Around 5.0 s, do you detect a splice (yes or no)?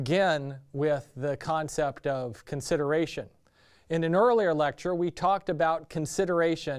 yes